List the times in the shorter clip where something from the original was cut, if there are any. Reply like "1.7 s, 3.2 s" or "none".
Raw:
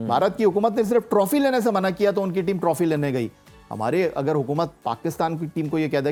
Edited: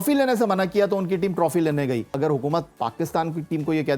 2.1 s